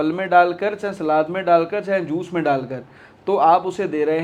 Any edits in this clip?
no; 0 cuts

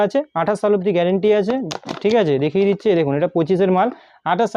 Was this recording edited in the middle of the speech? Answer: no; 0 cuts

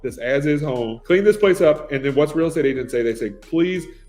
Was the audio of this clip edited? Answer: yes; 1 cut; at 1.0 s

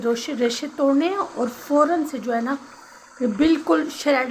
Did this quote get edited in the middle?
no; 0 cuts

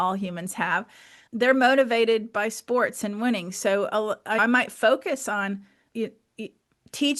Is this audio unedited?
yes; 0 cuts

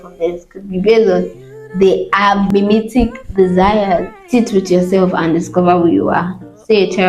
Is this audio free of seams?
no; 2 cuts; at 2.5 s, 4.1 s

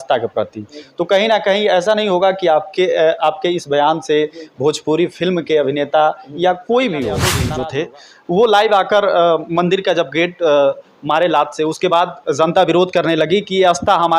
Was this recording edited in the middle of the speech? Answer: yes; 1 cut; at 7.4 s

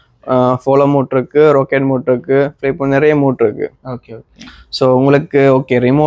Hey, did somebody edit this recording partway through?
no; 0 cuts

